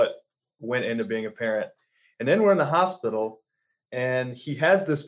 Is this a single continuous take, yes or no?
yes